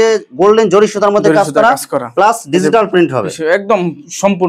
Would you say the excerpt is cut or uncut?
uncut